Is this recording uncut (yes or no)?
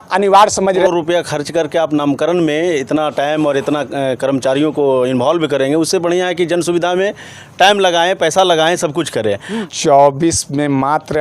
no